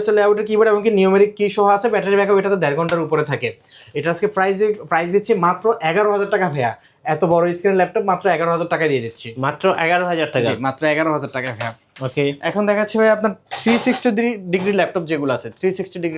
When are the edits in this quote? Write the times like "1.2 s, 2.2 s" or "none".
none

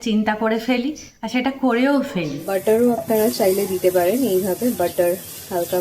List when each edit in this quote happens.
2.5 s

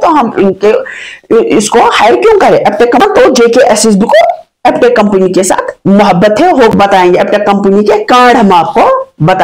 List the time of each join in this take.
3.0 s, 6.7 s, 7.7 s

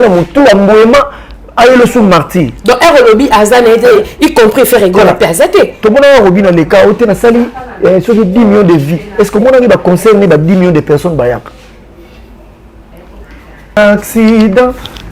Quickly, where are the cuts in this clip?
13.8 s

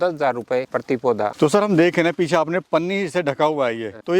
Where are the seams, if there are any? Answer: none

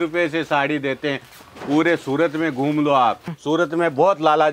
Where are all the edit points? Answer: 3.3 s

